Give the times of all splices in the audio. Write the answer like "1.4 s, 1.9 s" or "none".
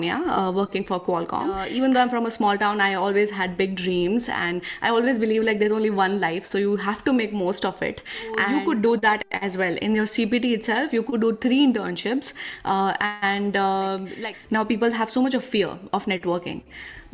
1.7 s, 8.4 s, 14.1 s